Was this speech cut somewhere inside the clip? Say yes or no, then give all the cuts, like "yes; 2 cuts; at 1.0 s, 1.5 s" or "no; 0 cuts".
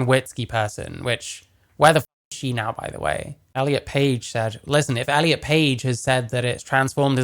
yes; 1 cut; at 3.4 s